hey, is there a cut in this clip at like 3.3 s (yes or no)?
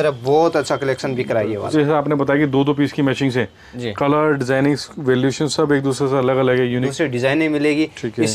no